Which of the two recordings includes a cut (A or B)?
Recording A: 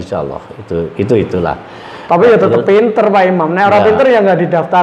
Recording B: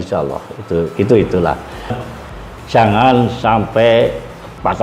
B